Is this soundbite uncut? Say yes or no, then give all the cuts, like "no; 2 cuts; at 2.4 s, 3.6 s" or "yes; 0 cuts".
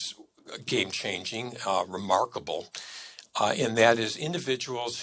yes; 0 cuts